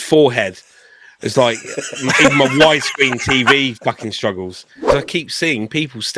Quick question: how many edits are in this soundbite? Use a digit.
1